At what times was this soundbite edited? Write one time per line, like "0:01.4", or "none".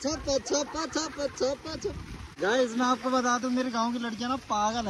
none